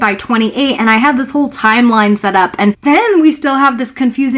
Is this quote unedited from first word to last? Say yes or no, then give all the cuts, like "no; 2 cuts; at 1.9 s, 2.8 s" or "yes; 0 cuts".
no; 1 cut; at 2.8 s